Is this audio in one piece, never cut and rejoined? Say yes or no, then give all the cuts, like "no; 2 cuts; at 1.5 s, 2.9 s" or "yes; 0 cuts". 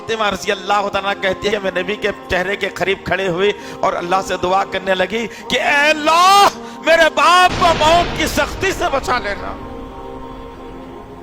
no; 1 cut; at 1.5 s